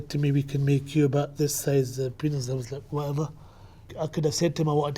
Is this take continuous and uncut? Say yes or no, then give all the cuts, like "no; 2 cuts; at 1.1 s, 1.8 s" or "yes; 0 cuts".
no; 1 cut; at 3.9 s